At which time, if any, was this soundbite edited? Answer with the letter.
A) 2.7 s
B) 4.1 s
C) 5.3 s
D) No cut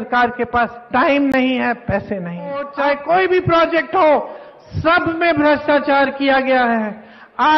A